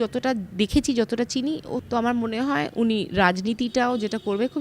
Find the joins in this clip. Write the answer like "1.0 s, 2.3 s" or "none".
1.8 s

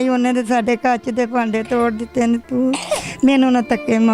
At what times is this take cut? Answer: none

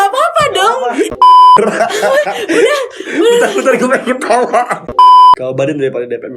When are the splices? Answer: 1.6 s, 5.4 s

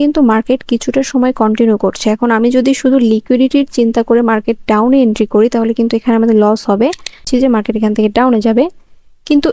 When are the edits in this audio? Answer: 7.2 s

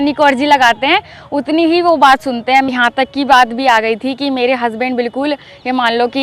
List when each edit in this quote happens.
2.7 s

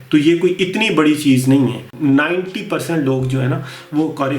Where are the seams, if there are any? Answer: 1.9 s

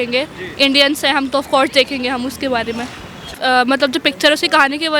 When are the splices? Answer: 3.2 s

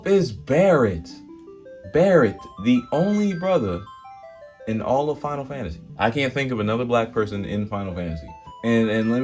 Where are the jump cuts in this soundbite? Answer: none

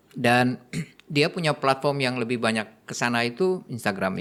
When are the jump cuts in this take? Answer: none

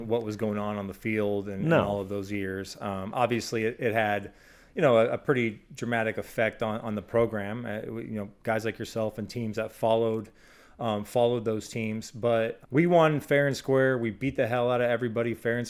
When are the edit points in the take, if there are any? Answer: none

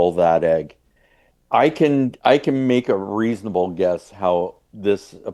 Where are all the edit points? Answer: none

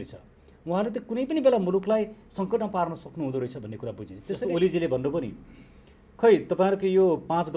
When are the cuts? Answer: 4.4 s

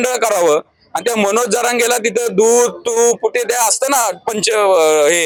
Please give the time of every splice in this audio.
none

